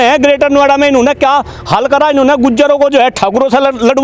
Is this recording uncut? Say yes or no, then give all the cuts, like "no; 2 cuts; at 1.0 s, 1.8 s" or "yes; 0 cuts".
yes; 0 cuts